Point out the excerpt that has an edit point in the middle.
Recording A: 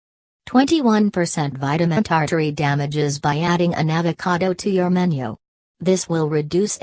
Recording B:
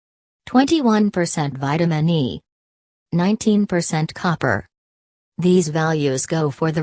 B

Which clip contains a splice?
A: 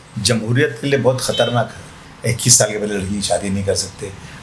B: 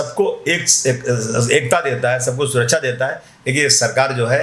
A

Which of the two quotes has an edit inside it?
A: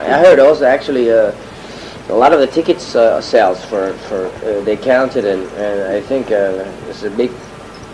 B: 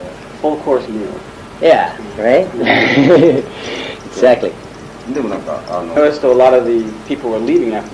A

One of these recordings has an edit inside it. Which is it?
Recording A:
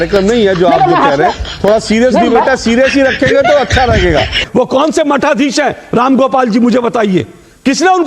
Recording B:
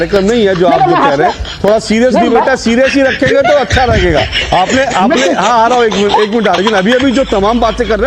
A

